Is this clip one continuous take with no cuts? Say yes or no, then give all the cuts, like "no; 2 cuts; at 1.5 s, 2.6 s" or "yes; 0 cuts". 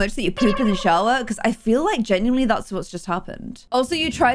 yes; 0 cuts